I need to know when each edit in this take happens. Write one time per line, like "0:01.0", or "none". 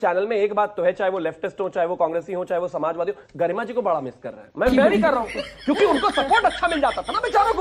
none